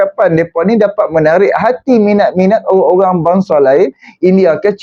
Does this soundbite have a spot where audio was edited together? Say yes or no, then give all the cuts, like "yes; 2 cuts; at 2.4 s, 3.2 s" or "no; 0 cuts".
no; 0 cuts